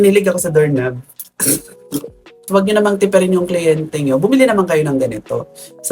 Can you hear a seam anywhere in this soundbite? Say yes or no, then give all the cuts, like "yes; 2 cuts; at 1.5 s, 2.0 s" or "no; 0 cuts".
yes; 1 cut; at 2.3 s